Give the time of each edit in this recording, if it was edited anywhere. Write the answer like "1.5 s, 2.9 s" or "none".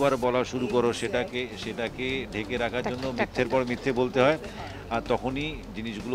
none

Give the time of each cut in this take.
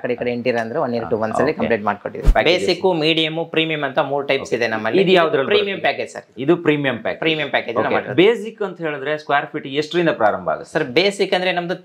2.2 s

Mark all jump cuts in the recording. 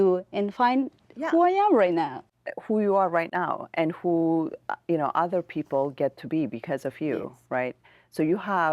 none

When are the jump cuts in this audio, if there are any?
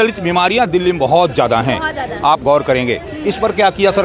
none

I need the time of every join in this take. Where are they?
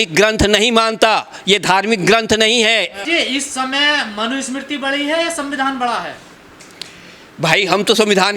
3.0 s

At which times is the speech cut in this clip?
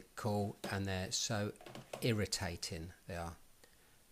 1.4 s

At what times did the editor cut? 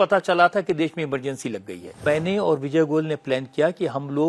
2.0 s

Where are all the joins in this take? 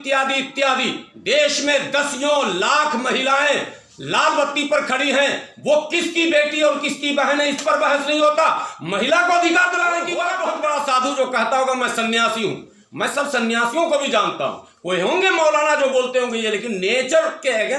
10.3 s

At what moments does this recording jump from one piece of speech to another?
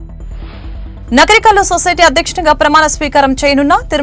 none

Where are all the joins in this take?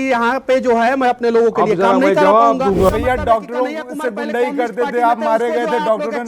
2.9 s

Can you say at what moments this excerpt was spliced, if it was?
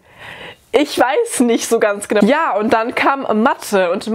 2.2 s

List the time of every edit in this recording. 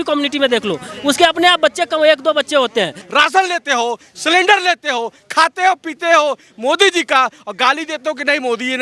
3.0 s

